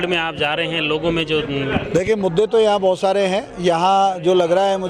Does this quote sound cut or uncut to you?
uncut